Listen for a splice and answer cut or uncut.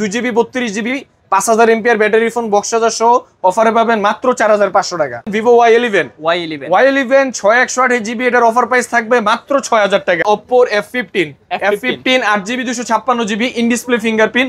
cut